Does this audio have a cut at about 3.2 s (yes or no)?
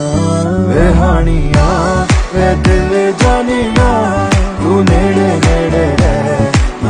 no